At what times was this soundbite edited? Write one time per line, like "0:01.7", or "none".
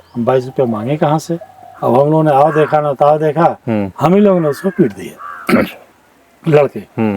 0:01.7